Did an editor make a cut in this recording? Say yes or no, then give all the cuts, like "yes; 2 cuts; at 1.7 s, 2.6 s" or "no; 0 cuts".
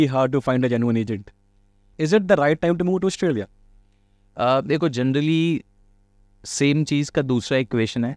yes; 1 cut; at 1.9 s